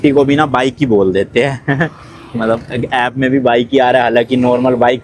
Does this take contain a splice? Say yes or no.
no